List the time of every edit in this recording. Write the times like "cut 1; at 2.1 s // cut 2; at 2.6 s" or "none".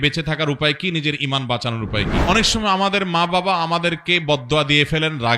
cut 1; at 2.2 s